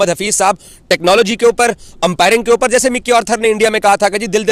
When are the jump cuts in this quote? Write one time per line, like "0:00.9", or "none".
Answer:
none